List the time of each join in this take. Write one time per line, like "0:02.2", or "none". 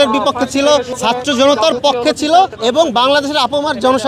0:00.9
0:02.5